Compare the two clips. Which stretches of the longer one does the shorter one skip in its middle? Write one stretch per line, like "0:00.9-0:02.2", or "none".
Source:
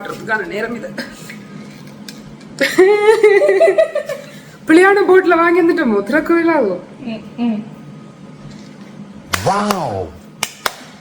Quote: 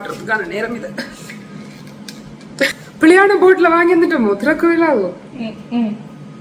0:02.6-0:04.2